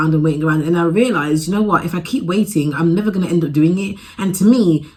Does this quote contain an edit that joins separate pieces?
no; 0 cuts

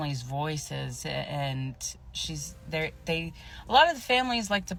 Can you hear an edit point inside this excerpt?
no; 0 cuts

